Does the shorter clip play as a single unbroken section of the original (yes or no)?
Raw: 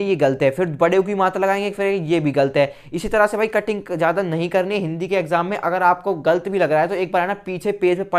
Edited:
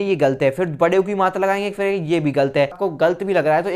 no